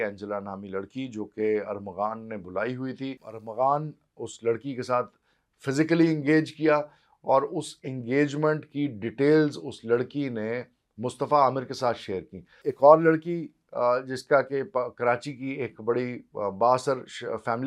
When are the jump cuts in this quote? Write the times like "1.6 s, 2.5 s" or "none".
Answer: 3.3 s, 12.6 s